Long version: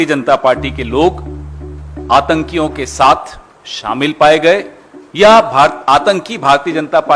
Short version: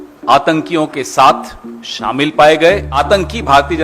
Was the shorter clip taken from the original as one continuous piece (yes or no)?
no